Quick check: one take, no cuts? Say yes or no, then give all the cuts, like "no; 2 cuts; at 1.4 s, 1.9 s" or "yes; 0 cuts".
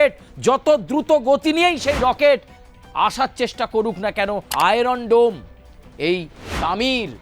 no; 1 cut; at 4.5 s